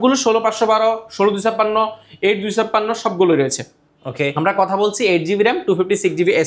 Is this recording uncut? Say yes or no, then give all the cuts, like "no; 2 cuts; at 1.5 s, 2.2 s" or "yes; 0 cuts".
yes; 0 cuts